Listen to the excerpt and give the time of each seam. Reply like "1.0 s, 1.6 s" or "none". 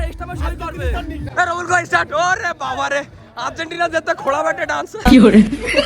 1.3 s, 4.9 s